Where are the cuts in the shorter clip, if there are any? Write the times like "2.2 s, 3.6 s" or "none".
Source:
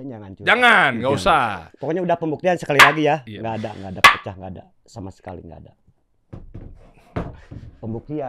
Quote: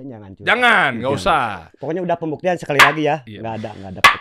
none